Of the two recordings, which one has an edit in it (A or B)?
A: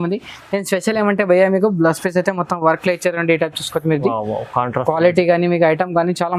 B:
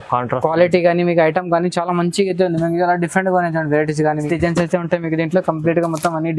B